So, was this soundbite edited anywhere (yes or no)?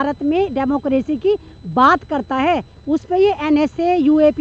no